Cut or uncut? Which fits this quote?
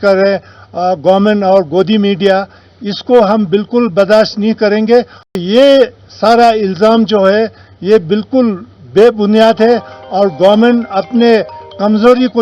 cut